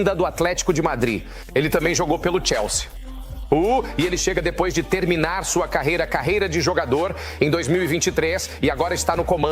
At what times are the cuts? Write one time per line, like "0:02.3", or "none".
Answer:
none